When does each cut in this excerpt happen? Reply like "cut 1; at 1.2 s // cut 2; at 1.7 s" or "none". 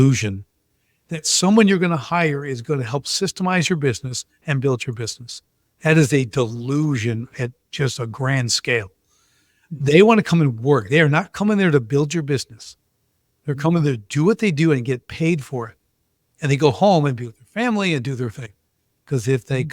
none